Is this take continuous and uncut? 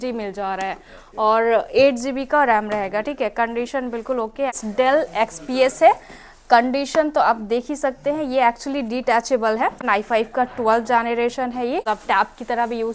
no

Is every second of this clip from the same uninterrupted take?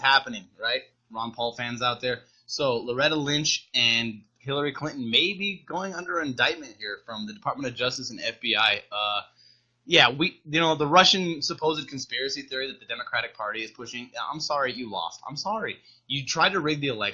no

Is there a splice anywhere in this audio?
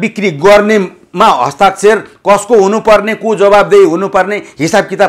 no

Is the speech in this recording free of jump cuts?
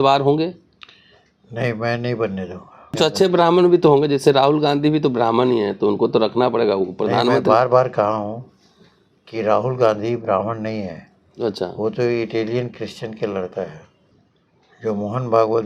no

